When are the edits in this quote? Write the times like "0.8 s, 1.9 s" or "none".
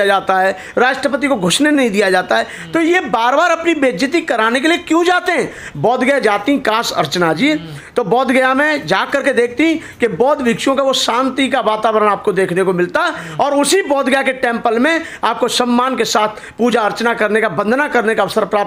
none